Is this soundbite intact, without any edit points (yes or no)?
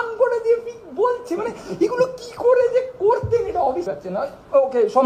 no